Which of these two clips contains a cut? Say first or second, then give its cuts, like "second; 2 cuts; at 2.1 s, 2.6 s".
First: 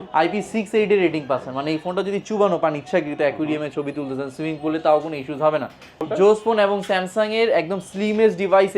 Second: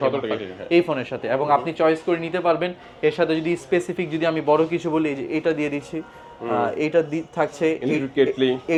first; 1 cut; at 6.0 s